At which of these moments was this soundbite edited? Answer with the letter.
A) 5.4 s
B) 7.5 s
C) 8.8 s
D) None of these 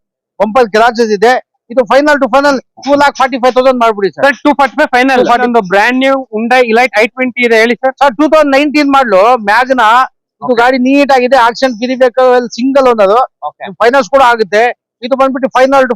A